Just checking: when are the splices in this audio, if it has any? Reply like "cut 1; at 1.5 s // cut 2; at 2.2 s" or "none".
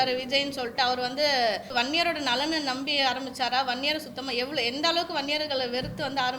cut 1; at 1.7 s